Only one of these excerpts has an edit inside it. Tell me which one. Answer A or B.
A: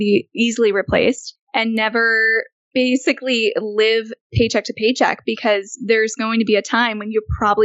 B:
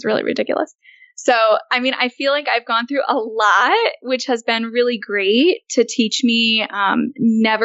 A